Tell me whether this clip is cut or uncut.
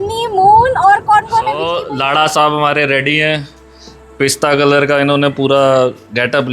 cut